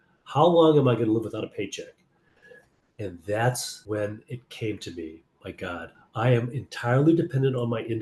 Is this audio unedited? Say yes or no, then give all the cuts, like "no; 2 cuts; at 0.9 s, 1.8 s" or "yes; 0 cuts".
no; 2 cuts; at 3.7 s, 6.0 s